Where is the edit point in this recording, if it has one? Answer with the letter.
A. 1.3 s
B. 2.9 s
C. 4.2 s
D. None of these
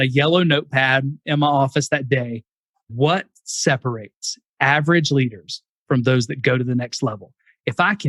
B